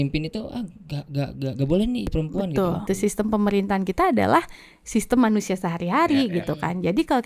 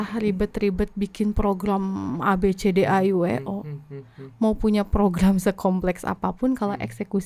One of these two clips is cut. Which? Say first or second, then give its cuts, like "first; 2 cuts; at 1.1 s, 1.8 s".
first; 2 cuts; at 2.1 s, 2.8 s